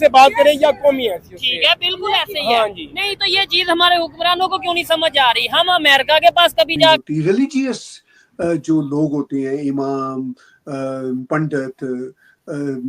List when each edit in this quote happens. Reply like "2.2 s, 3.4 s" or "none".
7.0 s

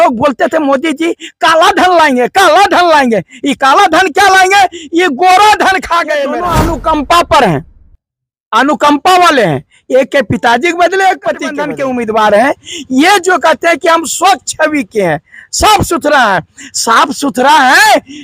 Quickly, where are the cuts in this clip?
6.3 s, 11.6 s

